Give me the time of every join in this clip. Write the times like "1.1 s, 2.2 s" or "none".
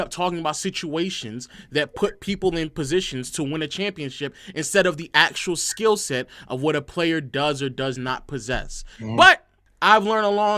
none